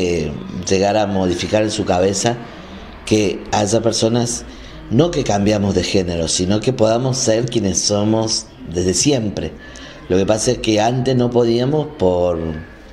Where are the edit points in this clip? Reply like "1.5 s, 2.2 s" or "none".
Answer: none